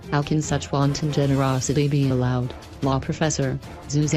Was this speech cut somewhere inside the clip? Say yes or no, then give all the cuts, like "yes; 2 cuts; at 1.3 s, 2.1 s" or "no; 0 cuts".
yes; 1 cut; at 3.0 s